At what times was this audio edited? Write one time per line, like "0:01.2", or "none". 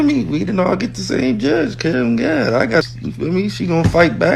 0:03.0